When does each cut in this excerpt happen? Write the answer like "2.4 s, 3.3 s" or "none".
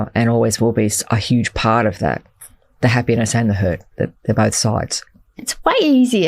5.4 s